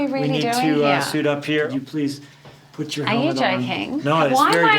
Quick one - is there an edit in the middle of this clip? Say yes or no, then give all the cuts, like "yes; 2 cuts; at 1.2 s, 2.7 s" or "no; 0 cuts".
yes; 1 cut; at 1.7 s